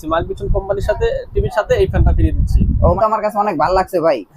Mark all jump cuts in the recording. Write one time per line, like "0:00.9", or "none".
0:03.0